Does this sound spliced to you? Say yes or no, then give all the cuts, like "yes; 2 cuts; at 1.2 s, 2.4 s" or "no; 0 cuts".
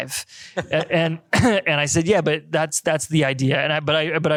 no; 0 cuts